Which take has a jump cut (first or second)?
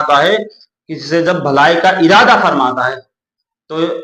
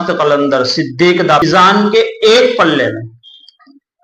second